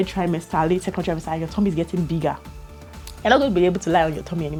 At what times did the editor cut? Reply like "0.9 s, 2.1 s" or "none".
none